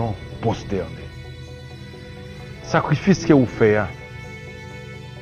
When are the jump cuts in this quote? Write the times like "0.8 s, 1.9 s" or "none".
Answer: none